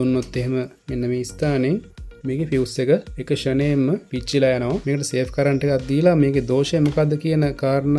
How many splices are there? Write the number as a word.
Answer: one